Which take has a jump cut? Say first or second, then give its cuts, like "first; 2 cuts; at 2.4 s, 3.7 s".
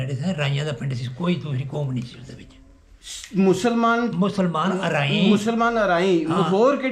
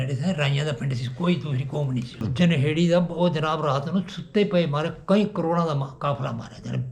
second; 1 cut; at 2.2 s